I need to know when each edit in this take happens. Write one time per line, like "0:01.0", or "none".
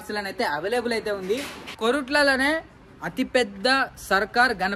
0:01.7